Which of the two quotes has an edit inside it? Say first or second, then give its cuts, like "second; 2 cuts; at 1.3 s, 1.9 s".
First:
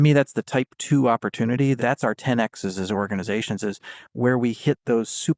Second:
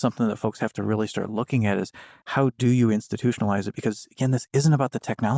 first; 1 cut; at 1.8 s